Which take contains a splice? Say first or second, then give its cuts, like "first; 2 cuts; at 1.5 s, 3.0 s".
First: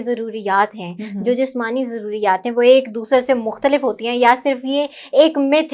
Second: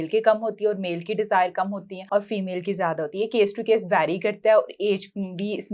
second; 1 cut; at 1.9 s